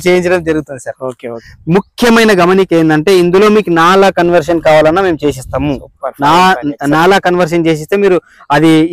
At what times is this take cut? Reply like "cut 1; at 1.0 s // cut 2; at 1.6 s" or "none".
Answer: cut 1; at 1.5 s